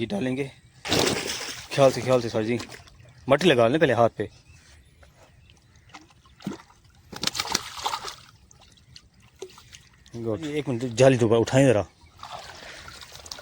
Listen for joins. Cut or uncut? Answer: cut